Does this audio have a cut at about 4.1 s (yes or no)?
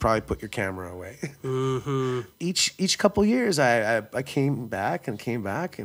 no